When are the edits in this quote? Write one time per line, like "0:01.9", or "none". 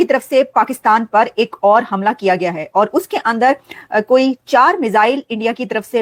none